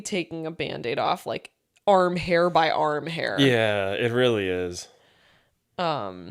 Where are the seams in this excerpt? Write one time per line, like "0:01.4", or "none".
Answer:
none